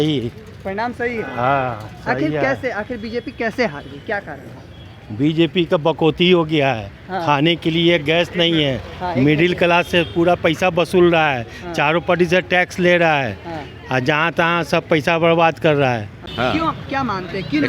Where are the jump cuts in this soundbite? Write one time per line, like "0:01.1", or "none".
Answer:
0:16.2

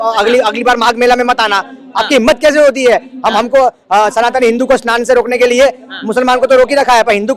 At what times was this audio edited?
none

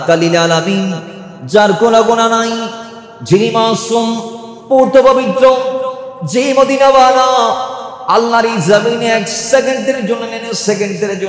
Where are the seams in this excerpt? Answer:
none

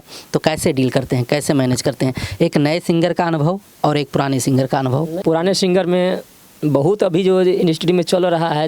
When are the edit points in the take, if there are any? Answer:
none

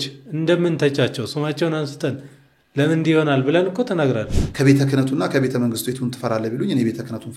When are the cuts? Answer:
0:04.3

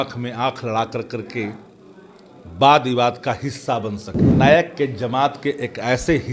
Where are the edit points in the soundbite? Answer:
0:04.4

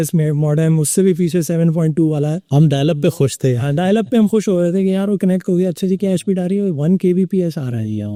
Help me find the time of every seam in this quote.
none

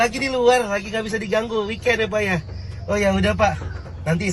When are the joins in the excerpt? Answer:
none

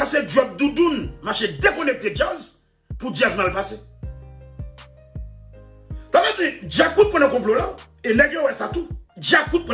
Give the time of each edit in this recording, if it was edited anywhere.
none

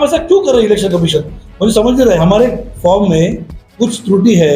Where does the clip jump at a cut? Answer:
0:02.2

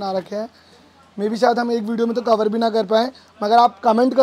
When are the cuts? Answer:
none

